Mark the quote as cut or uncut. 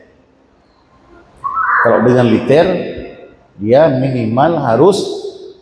uncut